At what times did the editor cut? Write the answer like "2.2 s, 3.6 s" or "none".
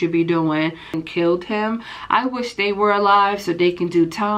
1.0 s